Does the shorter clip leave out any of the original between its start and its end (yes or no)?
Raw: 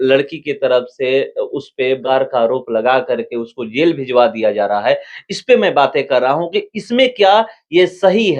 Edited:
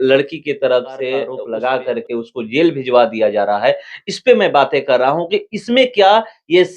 yes